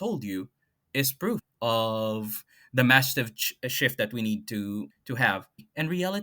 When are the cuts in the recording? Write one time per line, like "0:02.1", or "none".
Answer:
0:01.5
0:05.4